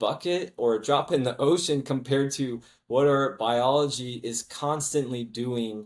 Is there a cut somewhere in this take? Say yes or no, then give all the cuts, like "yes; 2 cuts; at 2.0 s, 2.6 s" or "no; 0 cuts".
no; 0 cuts